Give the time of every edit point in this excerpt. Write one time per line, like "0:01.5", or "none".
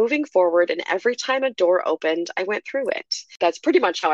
0:03.2